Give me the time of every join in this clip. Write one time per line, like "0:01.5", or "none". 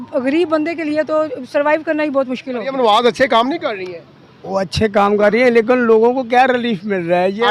0:02.6